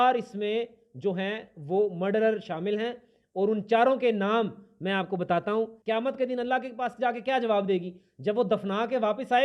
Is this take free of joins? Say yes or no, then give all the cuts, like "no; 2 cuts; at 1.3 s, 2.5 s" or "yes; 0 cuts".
no; 1 cut; at 5.8 s